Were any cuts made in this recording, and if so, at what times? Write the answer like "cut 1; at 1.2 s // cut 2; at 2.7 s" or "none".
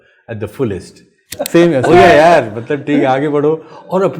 cut 1; at 1.2 s